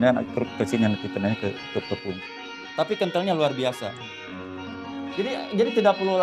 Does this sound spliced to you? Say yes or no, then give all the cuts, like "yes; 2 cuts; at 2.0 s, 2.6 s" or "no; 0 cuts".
yes; 1 cut; at 2.2 s